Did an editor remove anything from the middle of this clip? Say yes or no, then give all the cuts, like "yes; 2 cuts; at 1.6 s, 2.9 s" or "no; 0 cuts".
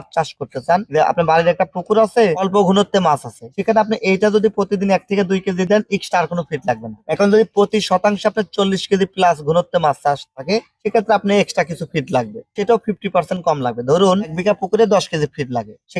no; 0 cuts